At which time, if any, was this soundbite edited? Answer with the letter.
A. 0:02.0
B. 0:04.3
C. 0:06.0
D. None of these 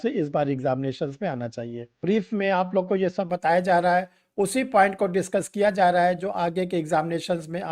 A